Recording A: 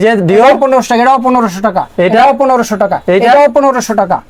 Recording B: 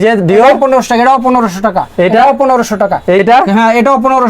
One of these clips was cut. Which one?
B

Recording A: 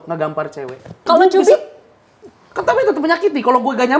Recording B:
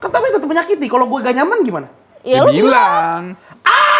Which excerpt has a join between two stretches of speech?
A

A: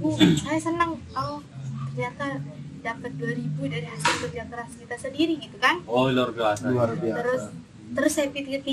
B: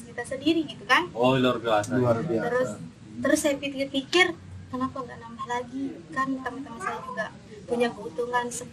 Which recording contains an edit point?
B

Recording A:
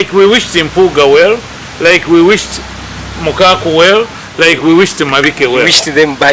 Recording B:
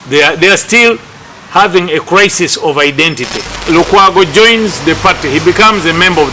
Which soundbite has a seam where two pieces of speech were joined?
B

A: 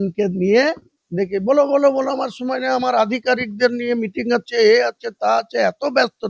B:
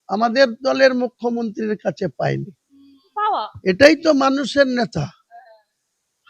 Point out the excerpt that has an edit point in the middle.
B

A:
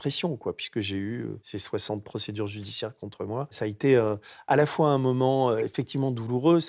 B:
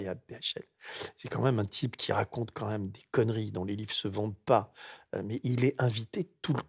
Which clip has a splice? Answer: A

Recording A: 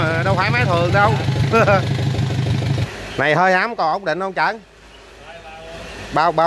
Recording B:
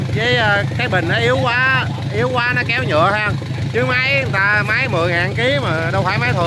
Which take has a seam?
A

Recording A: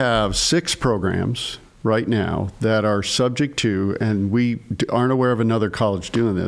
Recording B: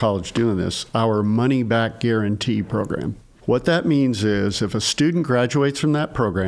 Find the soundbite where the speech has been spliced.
B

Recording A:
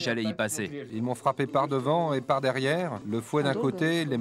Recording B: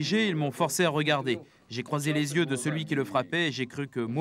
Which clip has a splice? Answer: A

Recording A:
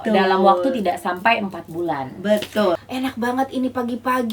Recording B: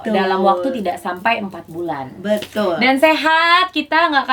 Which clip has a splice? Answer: A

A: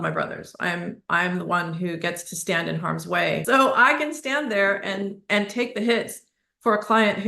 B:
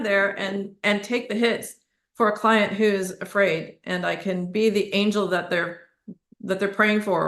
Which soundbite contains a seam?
A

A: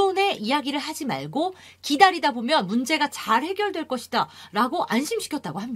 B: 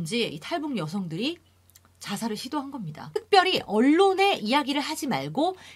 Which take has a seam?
B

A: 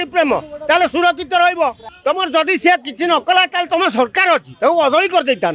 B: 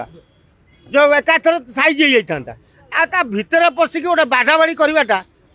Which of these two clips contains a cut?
A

